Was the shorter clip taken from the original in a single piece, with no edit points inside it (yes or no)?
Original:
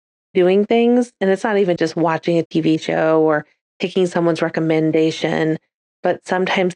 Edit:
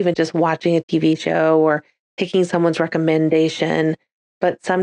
yes